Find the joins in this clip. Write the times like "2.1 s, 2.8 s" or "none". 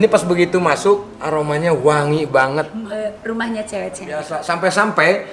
1.2 s, 2.8 s, 4.3 s